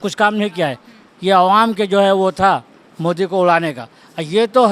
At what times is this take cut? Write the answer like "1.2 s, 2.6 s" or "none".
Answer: none